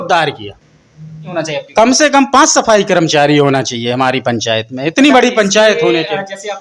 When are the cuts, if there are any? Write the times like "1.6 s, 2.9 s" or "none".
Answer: 1.3 s